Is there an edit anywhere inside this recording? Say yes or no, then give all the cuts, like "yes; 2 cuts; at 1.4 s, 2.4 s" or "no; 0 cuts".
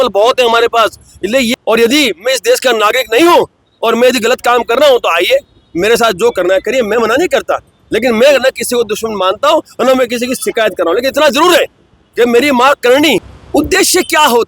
yes; 2 cuts; at 1.5 s, 13.4 s